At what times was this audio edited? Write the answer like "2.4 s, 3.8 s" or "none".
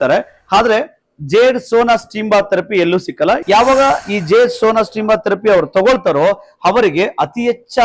3.4 s